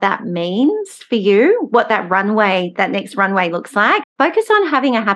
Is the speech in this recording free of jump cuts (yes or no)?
no